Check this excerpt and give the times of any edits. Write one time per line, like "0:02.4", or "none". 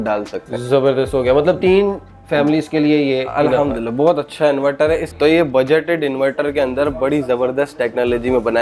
0:05.1